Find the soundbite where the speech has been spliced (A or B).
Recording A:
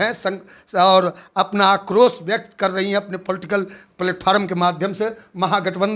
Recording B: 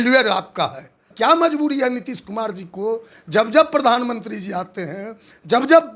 B